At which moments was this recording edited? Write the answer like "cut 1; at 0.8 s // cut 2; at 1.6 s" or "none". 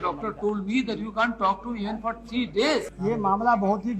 cut 1; at 2.9 s